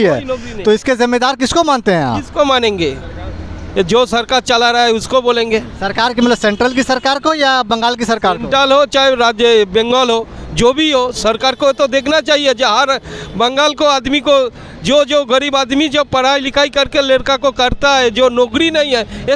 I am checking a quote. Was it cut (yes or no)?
no